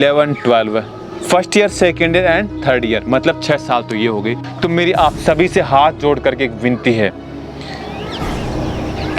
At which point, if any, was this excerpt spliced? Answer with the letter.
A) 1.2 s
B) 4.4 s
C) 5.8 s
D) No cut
B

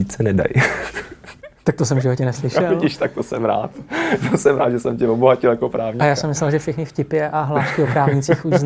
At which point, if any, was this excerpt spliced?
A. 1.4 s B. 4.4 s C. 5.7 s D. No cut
D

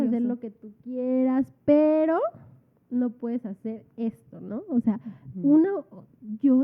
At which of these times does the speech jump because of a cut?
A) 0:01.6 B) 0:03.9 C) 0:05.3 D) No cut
D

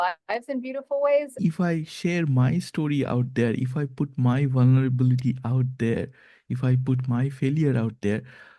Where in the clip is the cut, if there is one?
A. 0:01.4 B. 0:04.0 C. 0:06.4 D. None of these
A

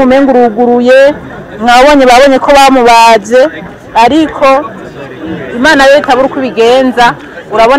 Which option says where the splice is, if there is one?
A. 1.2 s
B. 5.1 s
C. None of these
C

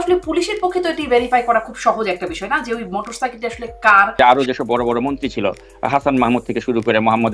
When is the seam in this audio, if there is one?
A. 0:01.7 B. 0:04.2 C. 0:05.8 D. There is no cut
B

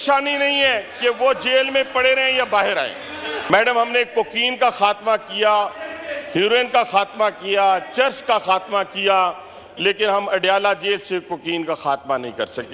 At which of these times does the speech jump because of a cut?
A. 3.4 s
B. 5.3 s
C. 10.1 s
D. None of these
A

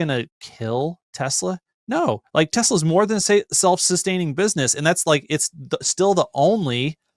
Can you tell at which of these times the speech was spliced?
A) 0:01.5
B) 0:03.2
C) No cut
C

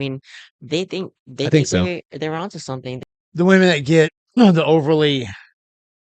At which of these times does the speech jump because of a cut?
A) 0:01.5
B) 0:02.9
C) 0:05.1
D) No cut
B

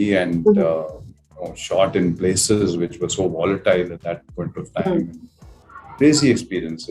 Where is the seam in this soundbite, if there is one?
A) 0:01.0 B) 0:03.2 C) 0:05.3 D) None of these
D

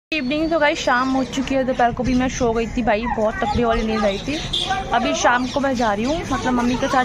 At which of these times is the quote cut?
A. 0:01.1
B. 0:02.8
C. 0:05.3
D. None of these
D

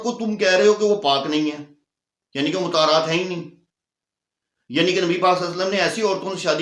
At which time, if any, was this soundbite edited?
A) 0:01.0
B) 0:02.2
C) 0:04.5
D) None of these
D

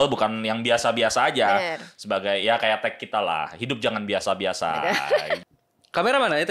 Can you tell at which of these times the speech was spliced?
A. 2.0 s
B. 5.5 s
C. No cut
B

